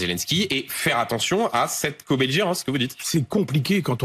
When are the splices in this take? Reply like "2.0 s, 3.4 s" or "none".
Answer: none